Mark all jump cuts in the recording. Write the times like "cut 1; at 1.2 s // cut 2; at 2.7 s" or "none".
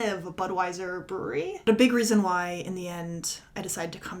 cut 1; at 1.7 s